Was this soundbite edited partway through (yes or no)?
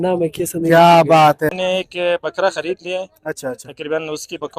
yes